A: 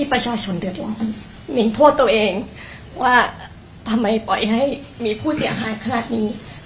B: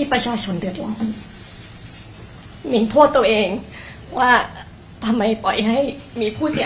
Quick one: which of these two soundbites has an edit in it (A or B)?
A